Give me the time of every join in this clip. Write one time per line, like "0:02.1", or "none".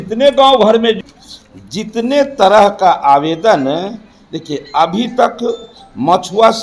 0:01.0